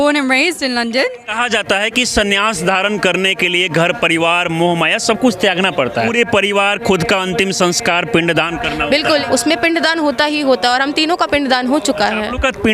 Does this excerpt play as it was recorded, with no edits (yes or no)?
no